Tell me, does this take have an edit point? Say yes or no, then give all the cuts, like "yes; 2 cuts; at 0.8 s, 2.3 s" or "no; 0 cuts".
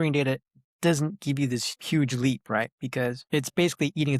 yes; 2 cuts; at 1.7 s, 3.2 s